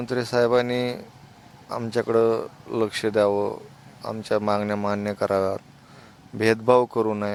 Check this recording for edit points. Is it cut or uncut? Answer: uncut